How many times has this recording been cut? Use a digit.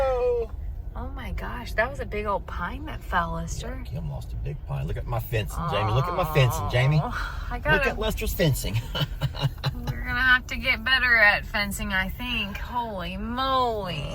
0